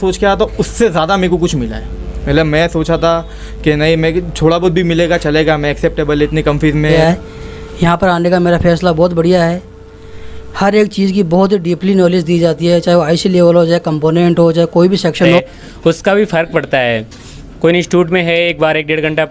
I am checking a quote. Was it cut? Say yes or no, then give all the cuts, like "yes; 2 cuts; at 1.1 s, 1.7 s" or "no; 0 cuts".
yes; 2 cuts; at 6.9 s, 15.2 s